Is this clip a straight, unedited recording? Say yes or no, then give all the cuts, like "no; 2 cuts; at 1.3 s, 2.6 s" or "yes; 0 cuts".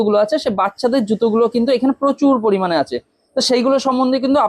yes; 0 cuts